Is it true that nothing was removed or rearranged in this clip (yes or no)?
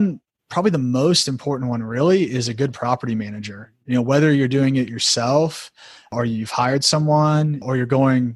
yes